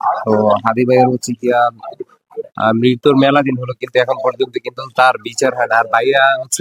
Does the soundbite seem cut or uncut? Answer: uncut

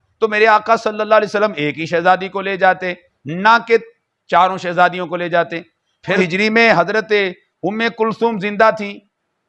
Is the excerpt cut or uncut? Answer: cut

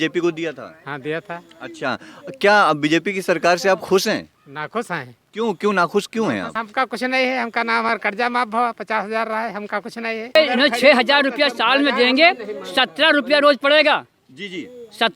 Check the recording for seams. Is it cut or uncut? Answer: cut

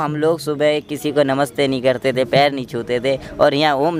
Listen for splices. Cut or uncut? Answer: uncut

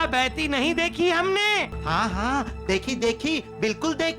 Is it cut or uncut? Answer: cut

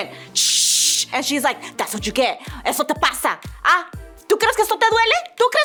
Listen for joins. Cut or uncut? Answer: uncut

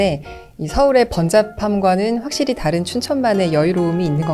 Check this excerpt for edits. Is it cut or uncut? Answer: uncut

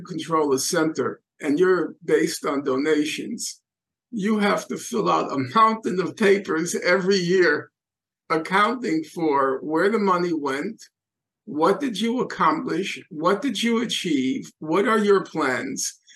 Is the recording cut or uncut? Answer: cut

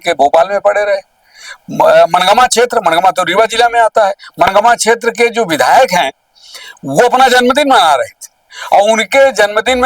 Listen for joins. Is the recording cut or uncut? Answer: uncut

